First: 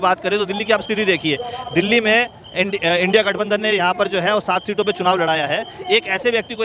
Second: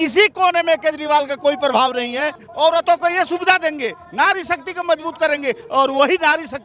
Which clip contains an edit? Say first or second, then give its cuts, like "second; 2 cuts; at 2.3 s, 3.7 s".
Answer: second; 1 cut; at 2.4 s